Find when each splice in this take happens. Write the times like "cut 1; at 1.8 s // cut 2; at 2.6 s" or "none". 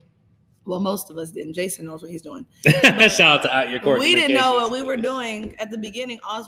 none